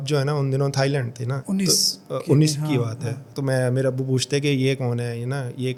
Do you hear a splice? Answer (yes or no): no